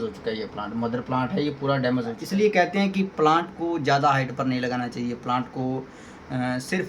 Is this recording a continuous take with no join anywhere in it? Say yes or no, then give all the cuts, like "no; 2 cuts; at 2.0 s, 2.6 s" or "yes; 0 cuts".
no; 1 cut; at 2.2 s